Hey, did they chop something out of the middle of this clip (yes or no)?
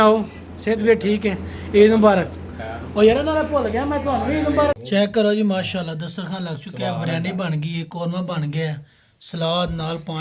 yes